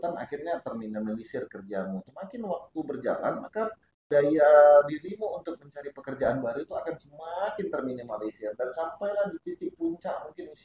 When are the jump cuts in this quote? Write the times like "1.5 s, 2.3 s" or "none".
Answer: 2.1 s, 3.9 s